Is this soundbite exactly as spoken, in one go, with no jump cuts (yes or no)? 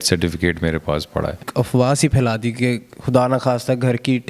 no